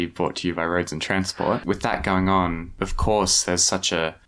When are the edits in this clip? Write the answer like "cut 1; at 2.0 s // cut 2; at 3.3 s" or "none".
cut 1; at 1.6 s // cut 2; at 2.7 s